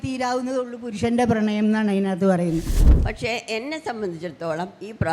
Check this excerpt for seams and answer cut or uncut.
cut